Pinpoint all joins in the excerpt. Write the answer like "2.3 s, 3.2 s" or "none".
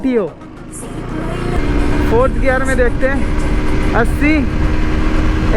1.6 s